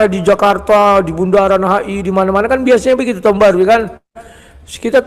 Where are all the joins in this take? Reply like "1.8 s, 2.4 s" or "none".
none